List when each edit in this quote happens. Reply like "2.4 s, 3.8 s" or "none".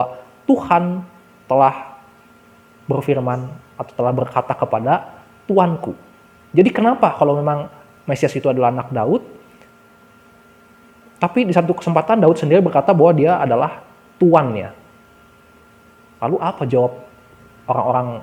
none